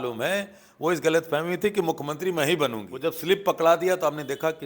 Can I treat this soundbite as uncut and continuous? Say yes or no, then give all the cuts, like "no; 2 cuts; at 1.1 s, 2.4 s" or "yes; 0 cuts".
no; 1 cut; at 2.9 s